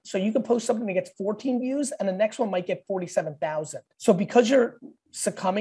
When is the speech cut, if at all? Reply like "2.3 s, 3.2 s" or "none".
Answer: 3.8 s